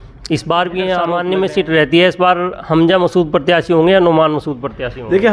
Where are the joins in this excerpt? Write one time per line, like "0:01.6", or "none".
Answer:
0:01.1